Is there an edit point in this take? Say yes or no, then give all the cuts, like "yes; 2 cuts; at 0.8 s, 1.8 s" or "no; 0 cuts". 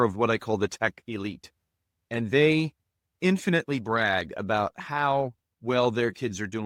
no; 0 cuts